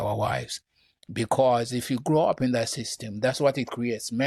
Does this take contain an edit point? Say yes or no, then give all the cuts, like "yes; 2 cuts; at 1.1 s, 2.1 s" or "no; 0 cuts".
no; 0 cuts